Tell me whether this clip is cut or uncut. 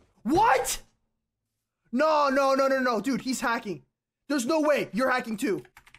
uncut